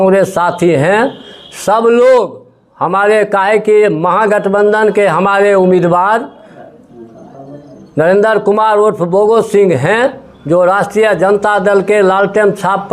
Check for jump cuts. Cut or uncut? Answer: uncut